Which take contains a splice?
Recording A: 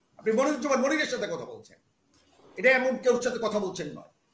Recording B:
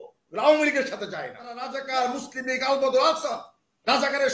B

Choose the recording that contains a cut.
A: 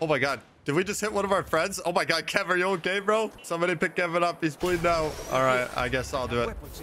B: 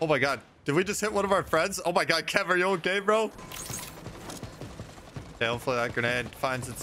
B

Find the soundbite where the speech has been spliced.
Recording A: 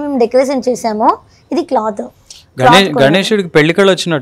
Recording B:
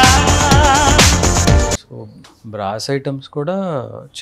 B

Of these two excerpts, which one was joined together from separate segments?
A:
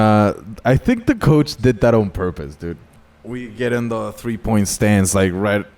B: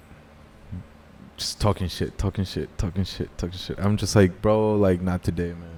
A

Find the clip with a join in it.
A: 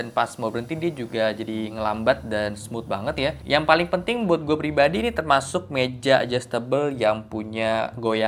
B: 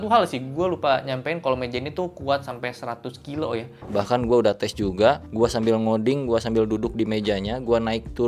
B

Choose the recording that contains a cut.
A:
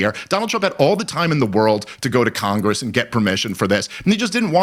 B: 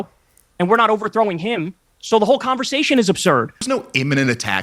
B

